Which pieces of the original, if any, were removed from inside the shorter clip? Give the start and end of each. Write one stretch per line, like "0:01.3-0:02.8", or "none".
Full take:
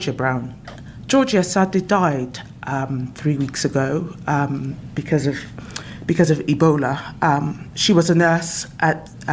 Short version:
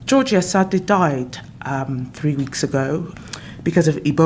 0:04.1-0:05.6